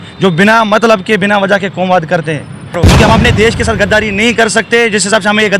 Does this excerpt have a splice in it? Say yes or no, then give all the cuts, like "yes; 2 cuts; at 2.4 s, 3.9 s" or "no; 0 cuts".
yes; 1 cut; at 2.8 s